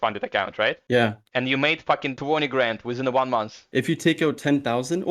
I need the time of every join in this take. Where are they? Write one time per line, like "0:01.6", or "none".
0:00.8
0:02.1
0:03.6